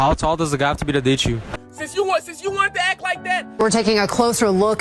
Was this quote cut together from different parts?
yes; 2 cuts; at 1.4 s, 3.5 s

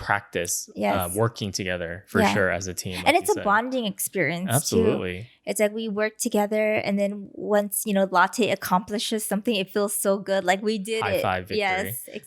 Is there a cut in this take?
no; 0 cuts

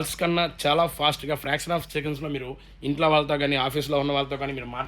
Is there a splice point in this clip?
no; 0 cuts

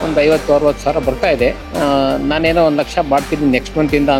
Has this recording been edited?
no; 0 cuts

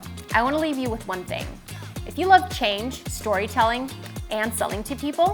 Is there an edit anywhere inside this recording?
no; 0 cuts

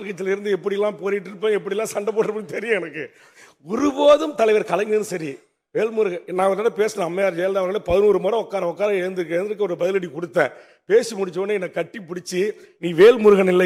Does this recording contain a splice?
no; 0 cuts

